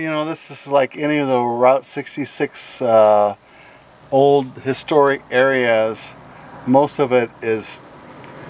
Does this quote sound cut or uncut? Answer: uncut